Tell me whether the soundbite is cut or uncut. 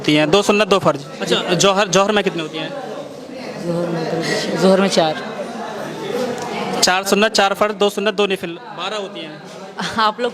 cut